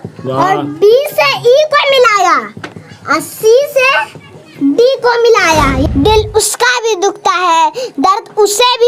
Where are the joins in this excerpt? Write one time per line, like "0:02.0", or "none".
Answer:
0:05.8